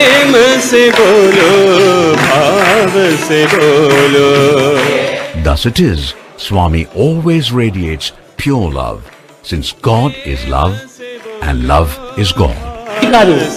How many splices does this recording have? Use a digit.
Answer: 0